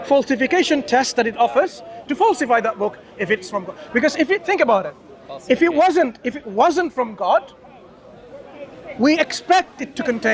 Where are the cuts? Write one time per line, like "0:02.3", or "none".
none